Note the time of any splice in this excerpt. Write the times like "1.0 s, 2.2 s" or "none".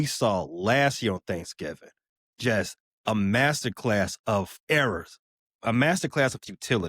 4.7 s